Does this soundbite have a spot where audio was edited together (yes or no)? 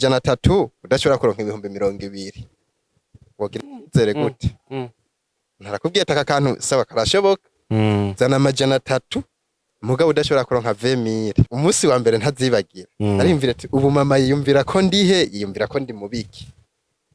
yes